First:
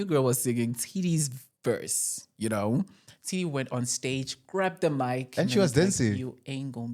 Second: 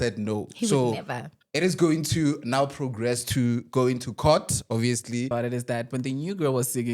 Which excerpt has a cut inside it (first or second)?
second